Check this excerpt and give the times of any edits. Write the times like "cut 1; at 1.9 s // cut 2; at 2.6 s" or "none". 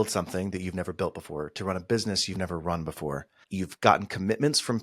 cut 1; at 3.3 s